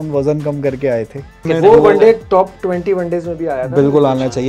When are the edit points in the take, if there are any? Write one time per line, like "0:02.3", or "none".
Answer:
0:01.4